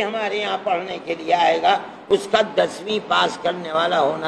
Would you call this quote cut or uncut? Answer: uncut